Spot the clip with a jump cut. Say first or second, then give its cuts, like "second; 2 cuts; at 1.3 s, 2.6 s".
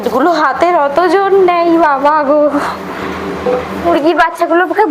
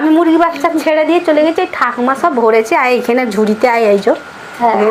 first; 1 cut; at 3.9 s